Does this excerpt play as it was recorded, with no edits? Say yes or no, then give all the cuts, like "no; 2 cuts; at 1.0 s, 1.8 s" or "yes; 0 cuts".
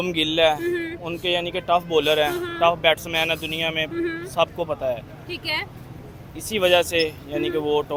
yes; 0 cuts